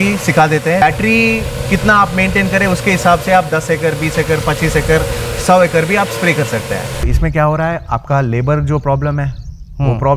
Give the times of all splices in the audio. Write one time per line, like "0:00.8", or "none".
0:00.8
0:07.1